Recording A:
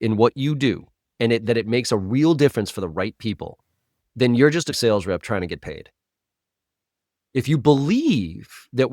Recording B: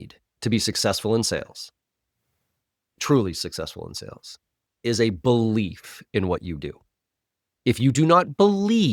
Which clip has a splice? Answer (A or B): A